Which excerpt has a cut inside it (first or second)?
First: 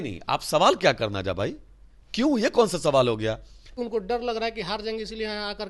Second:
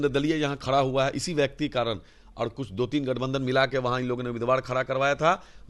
first